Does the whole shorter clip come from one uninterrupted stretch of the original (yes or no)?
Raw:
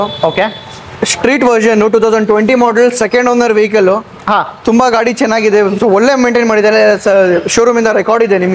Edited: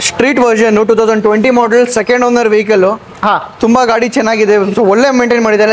yes